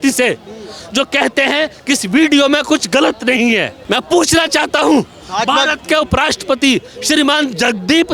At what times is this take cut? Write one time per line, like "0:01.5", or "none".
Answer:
none